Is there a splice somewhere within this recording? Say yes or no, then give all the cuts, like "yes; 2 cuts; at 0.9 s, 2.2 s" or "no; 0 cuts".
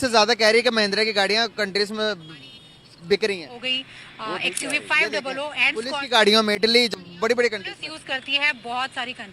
yes; 1 cut; at 6.9 s